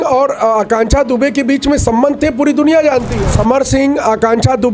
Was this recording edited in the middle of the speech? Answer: yes; 1 cut; at 3.1 s

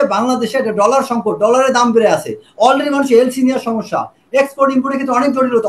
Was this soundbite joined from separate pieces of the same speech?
no; 0 cuts

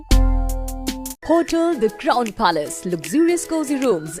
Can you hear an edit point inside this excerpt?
yes; 1 cut; at 1.1 s

